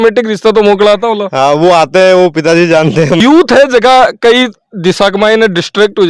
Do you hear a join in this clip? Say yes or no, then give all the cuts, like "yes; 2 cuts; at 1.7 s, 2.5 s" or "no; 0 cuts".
yes; 1 cut; at 3.2 s